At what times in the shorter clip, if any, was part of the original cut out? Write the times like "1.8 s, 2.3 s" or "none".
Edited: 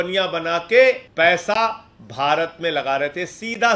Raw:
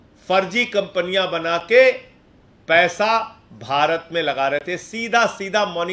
1.1 s